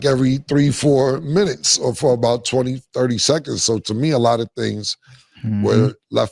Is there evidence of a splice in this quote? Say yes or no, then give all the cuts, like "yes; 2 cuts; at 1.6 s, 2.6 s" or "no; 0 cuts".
no; 0 cuts